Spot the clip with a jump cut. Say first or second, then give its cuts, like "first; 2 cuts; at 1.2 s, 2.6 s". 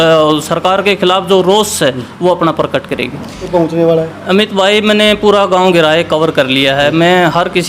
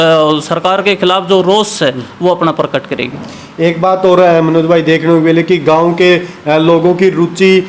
first; 1 cut; at 3.5 s